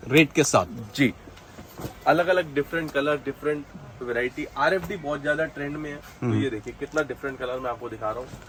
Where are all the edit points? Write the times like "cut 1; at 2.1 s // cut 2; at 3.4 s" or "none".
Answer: none